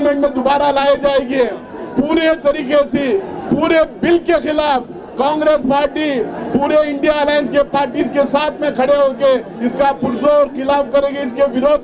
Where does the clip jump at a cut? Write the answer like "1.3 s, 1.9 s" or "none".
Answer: none